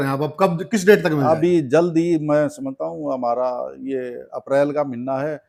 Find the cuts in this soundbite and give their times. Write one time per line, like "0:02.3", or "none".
none